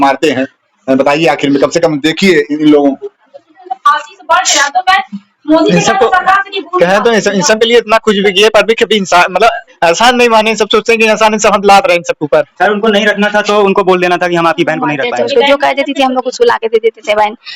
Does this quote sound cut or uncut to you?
cut